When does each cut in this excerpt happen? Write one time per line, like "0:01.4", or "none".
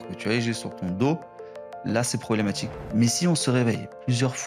0:02.7